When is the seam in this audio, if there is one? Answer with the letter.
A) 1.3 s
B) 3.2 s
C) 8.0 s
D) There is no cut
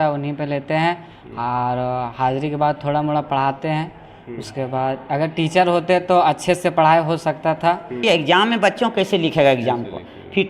C